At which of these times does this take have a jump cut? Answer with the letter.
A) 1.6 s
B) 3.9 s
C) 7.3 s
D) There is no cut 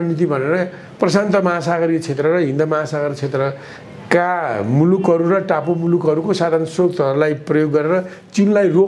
D